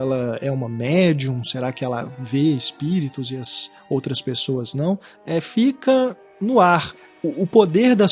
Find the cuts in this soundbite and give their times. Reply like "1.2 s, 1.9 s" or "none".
5.1 s, 6.3 s, 6.9 s